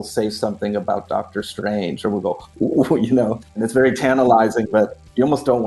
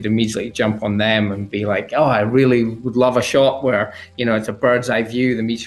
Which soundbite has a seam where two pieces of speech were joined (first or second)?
first